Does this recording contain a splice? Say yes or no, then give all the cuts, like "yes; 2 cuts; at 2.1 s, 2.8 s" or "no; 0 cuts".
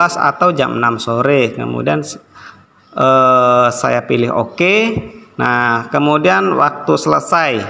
no; 0 cuts